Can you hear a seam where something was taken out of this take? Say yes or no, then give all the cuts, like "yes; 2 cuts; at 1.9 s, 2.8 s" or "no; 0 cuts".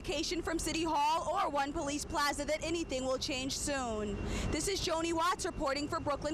no; 0 cuts